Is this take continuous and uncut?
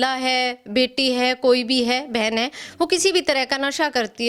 yes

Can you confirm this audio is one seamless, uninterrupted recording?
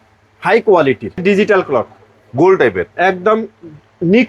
no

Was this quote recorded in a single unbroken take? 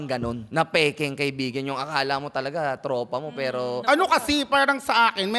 no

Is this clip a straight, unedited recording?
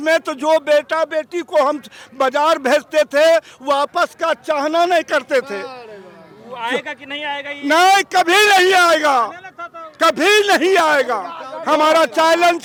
yes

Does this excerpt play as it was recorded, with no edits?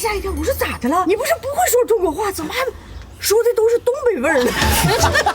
no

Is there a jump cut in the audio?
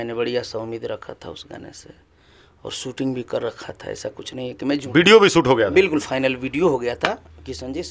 no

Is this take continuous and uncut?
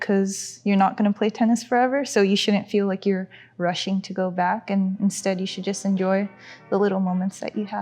yes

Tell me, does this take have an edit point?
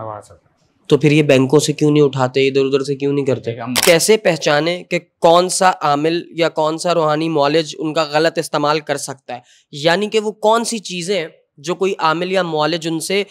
yes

